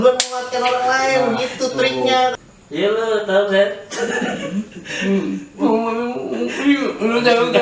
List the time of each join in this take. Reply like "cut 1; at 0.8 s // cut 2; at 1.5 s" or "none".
cut 1; at 2.3 s

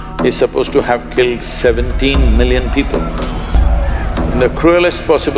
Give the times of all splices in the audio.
cut 1; at 3.6 s

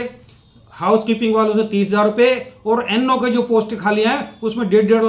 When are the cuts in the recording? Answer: none

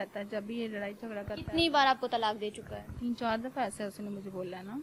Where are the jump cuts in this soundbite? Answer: none

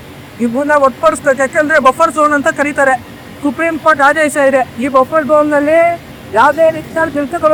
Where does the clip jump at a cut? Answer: none

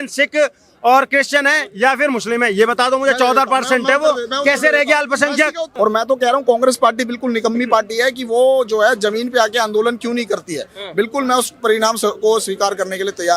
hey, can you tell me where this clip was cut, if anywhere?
cut 1; at 5.6 s

